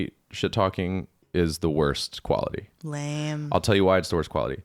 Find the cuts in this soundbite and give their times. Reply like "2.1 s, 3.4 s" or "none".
1.2 s